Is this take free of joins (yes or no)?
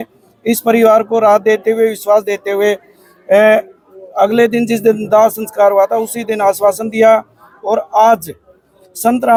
yes